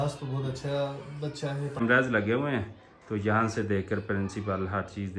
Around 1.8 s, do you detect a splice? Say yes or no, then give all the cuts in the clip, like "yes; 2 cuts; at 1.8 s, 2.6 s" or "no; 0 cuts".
yes; 1 cut; at 1.8 s